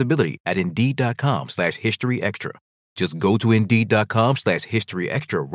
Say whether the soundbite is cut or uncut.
uncut